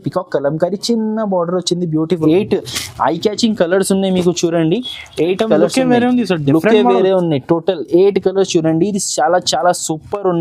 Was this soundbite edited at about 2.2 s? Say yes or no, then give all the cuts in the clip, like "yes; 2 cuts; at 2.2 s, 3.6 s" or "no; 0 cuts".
yes; 1 cut; at 2.2 s